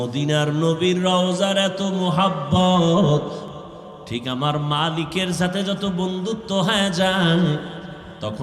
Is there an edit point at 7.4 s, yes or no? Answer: no